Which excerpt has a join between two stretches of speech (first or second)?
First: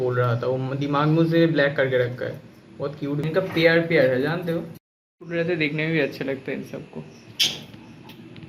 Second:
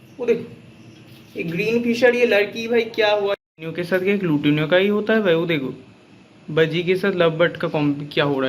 second